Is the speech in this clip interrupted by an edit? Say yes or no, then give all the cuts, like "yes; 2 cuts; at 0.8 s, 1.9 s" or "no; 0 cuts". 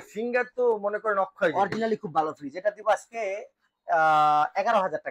no; 0 cuts